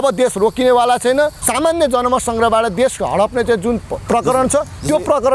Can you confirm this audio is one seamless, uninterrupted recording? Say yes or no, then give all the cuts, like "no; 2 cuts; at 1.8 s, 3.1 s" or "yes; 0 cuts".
no; 2 cuts; at 1.4 s, 3.9 s